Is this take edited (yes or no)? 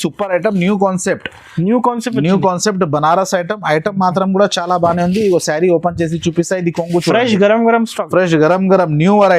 no